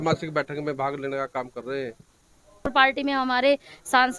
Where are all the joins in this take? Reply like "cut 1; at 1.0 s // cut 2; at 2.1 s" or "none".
cut 1; at 2.7 s

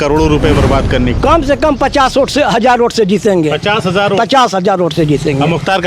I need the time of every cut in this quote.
cut 1; at 1.1 s

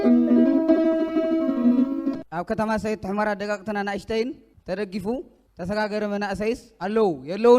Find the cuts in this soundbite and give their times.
cut 1; at 2.0 s

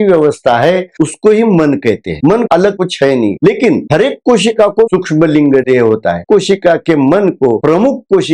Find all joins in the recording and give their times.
cut 1; at 2.5 s // cut 2; at 4.9 s // cut 3; at 6.2 s // cut 4; at 7.6 s

